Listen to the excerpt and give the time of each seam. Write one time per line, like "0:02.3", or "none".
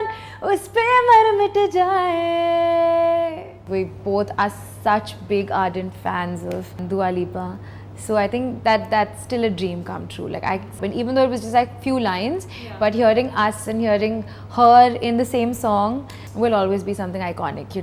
0:03.6
0:06.8
0:10.8
0:16.2